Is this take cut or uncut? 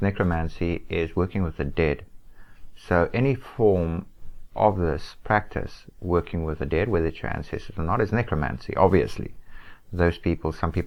uncut